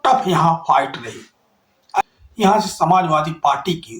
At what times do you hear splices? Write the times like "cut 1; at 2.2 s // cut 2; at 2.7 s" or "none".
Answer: cut 1; at 2.0 s